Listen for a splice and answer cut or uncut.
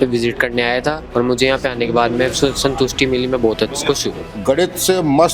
cut